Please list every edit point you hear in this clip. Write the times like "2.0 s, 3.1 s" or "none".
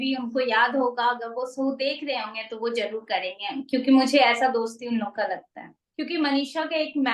5.8 s